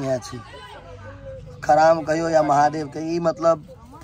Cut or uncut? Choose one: uncut